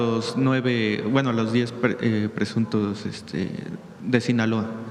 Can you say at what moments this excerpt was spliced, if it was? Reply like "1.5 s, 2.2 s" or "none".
none